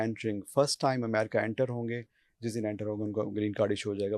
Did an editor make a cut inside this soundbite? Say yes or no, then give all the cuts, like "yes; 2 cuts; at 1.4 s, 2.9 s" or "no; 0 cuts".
no; 0 cuts